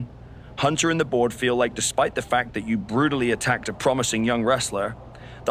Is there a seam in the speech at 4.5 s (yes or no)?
no